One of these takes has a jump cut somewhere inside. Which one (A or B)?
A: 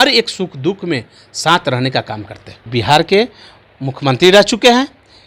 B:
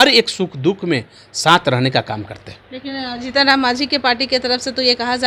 A